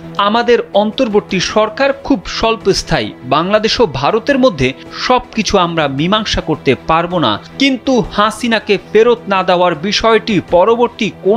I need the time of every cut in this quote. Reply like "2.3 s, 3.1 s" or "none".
none